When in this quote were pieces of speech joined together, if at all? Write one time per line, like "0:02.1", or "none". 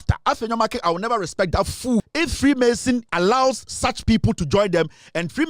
0:02.0
0:03.1